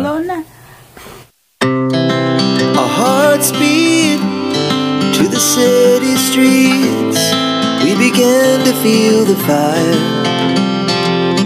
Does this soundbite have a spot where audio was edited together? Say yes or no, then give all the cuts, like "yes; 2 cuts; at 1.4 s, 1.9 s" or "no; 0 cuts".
yes; 1 cut; at 1.2 s